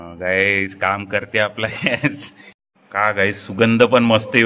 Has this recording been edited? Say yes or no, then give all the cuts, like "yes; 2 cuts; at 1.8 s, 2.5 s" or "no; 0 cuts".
yes; 1 cut; at 2.6 s